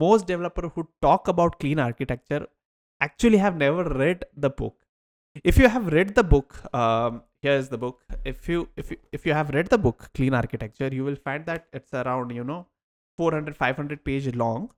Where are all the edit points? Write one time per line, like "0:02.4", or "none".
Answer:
none